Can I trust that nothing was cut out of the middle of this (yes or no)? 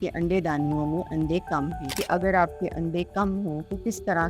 no